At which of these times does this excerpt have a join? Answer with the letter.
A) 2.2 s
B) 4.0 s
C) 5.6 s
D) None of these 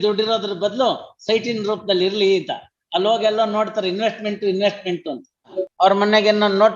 C